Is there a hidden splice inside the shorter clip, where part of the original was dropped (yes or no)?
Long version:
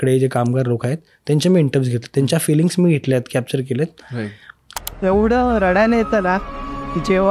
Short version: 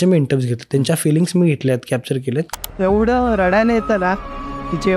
yes